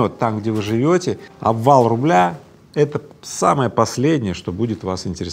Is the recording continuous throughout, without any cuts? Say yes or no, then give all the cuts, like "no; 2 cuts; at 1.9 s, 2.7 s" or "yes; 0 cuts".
no; 1 cut; at 1.2 s